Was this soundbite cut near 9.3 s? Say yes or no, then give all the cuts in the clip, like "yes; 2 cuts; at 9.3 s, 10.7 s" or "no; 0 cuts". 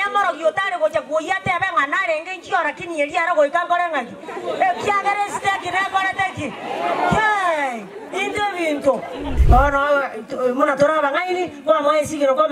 yes; 1 cut; at 9.3 s